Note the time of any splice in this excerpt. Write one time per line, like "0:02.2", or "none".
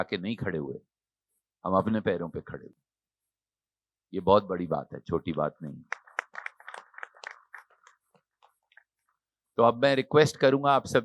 none